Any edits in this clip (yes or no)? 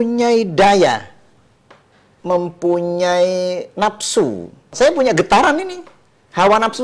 yes